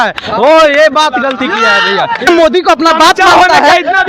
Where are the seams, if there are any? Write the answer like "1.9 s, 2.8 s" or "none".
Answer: 2.3 s